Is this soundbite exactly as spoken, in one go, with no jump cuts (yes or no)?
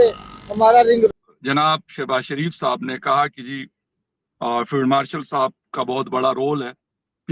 no